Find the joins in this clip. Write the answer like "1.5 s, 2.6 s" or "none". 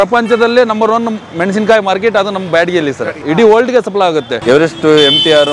3.1 s, 4.3 s

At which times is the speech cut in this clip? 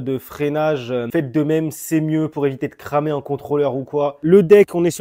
0.9 s, 4.2 s

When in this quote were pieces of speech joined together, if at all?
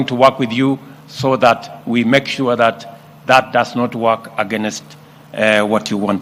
none

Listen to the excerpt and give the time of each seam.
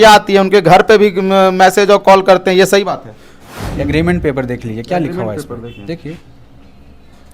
3.4 s

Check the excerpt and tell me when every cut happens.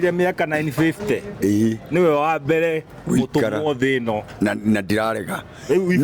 none

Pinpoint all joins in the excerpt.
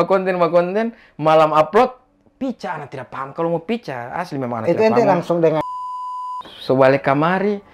6.0 s

